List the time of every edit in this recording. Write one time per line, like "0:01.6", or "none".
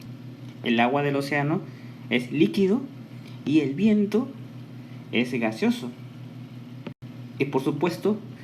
none